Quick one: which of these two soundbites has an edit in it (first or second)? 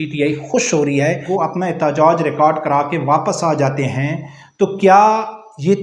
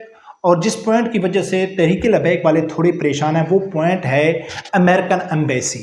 first